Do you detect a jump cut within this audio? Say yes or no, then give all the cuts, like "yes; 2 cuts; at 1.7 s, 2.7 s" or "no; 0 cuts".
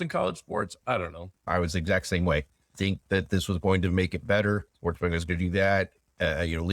yes; 3 cuts; at 1.3 s, 2.7 s, 4.7 s